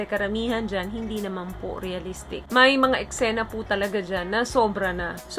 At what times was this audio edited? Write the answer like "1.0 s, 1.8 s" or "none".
none